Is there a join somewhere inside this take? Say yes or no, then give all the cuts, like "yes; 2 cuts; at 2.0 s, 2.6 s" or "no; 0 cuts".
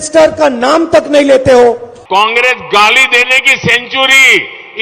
yes; 1 cut; at 1.9 s